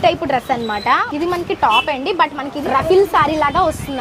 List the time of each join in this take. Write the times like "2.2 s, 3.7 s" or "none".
1.0 s, 2.6 s